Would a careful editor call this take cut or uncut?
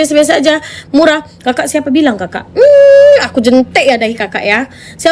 uncut